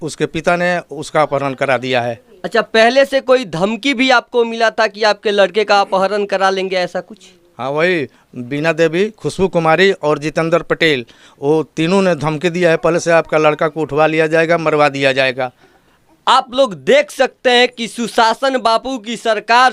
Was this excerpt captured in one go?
yes; 0 cuts

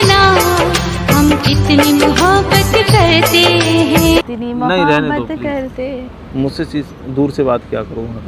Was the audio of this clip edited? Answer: no; 0 cuts

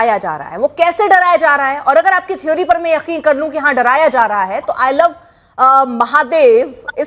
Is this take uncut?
yes; 0 cuts

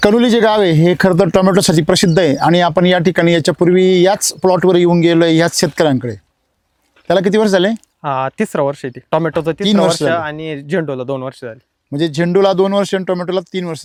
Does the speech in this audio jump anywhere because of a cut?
no; 0 cuts

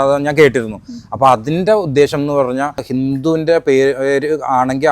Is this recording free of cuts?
no; 1 cut; at 2.8 s

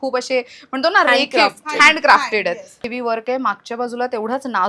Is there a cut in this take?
yes; 1 cut; at 2.9 s

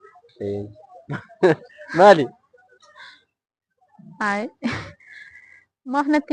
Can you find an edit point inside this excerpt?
no; 0 cuts

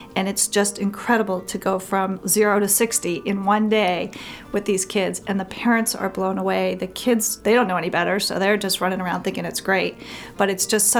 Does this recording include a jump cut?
yes; 2 cuts; at 2.2 s, 7.3 s

